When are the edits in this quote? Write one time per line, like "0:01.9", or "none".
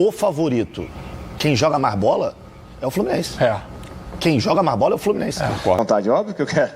0:05.8